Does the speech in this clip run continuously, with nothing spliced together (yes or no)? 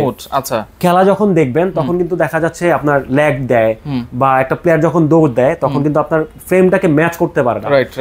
yes